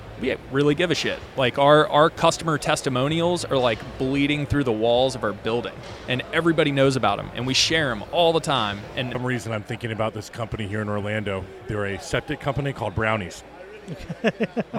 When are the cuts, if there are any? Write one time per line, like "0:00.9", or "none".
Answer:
0:09.1